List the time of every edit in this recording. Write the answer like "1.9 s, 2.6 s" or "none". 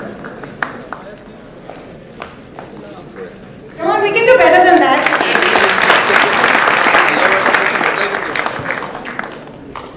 7.4 s